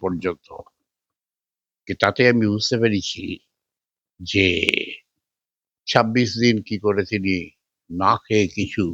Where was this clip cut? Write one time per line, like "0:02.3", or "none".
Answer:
none